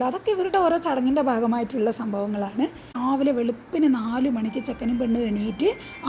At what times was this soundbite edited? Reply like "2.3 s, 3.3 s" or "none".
3.0 s